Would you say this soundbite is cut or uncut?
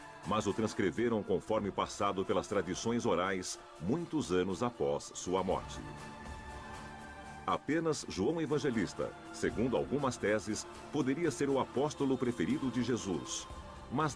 cut